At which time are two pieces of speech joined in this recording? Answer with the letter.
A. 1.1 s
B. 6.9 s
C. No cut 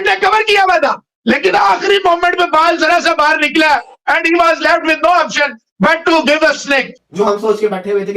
B